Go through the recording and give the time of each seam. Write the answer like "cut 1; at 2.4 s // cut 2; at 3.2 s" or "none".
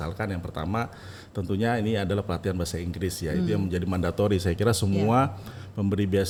none